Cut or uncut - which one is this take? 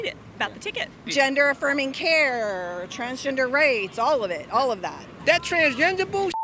cut